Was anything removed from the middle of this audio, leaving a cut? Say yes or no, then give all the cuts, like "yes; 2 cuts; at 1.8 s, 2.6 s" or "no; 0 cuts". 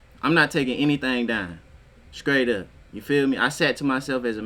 no; 0 cuts